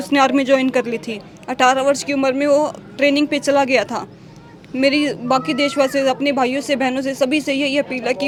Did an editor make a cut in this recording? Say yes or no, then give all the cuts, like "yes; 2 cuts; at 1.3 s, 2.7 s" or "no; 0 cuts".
no; 0 cuts